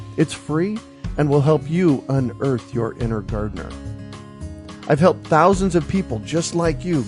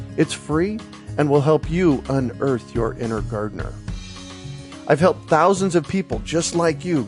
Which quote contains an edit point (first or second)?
first